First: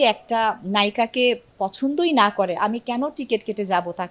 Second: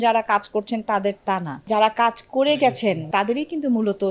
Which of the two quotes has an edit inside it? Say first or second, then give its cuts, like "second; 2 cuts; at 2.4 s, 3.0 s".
second; 2 cuts; at 1.7 s, 3.1 s